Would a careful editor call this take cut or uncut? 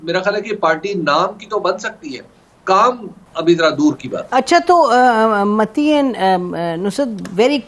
uncut